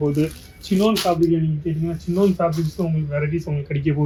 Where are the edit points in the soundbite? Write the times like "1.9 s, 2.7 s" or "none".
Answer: none